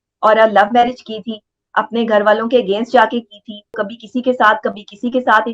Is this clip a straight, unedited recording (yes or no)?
no